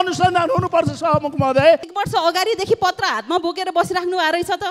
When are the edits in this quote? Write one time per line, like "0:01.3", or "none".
0:01.9